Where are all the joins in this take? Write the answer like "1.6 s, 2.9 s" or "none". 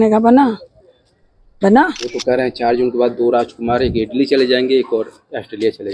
2.1 s